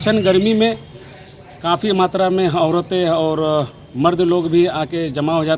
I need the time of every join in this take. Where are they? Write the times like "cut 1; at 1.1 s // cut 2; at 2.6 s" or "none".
none